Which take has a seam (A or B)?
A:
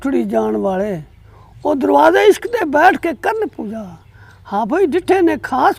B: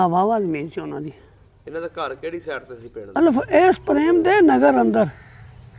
B